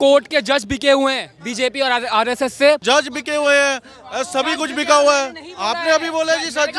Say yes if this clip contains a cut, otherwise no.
yes